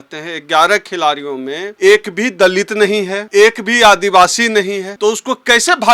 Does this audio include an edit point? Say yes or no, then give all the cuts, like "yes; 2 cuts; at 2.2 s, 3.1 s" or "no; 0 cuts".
yes; 3 cuts; at 1.6 s, 3.2 s, 4.9 s